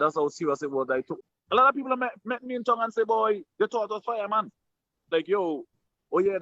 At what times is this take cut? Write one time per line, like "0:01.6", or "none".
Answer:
0:01.2
0:05.1

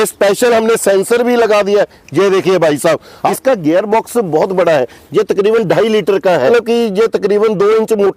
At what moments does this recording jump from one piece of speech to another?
0:03.2
0:06.5

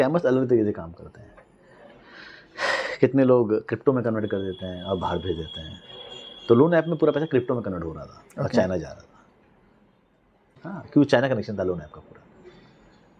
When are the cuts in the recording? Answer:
0:10.5

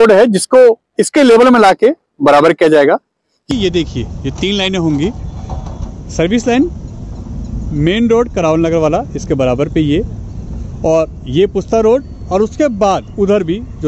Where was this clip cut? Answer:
0:03.4

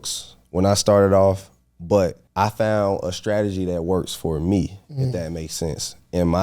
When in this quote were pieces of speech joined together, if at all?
0:02.2

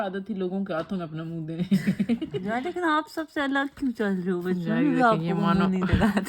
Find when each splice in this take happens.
0:02.3

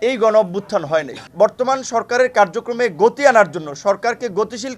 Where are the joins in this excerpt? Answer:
0:01.2

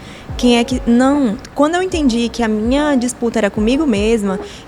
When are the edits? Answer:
0:01.4

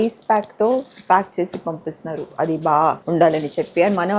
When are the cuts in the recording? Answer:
0:03.0

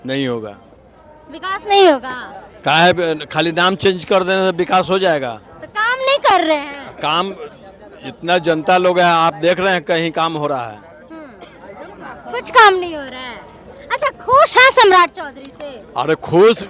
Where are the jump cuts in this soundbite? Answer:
none

